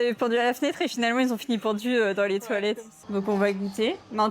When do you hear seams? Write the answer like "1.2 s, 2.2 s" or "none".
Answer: 2.9 s